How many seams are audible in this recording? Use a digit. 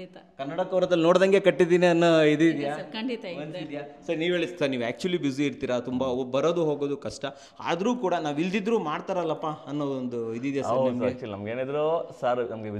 0